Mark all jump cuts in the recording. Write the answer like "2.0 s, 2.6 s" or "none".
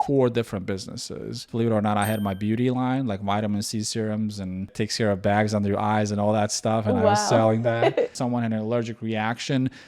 1.5 s, 8.1 s